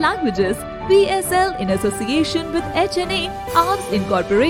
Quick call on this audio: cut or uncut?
uncut